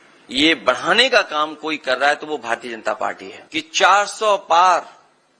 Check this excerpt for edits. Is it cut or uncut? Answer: cut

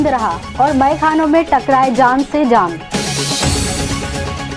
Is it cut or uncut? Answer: uncut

